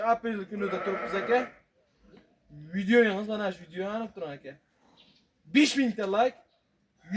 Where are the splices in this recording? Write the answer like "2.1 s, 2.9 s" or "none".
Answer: none

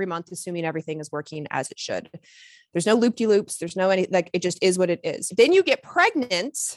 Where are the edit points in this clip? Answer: 5.3 s

